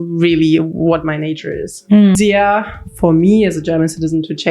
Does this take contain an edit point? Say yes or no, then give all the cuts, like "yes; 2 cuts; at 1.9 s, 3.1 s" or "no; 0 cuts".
yes; 1 cut; at 2.2 s